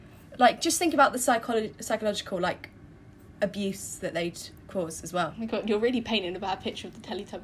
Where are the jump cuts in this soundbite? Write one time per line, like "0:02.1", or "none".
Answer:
0:05.3